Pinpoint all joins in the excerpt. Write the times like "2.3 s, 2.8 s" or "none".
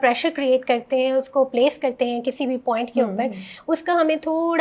none